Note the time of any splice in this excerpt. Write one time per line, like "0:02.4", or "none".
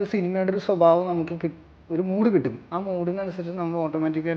none